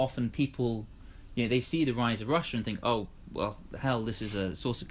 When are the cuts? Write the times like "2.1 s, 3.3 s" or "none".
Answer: none